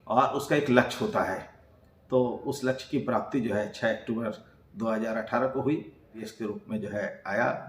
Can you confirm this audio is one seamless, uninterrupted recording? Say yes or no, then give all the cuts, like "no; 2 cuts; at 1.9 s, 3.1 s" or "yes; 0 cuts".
no; 1 cut; at 6.2 s